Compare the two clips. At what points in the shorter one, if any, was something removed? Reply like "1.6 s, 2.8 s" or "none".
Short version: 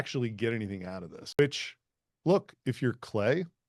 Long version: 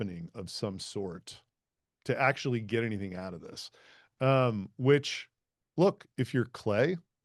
1.4 s